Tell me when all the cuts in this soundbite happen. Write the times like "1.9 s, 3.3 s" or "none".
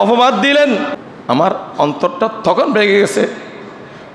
1.0 s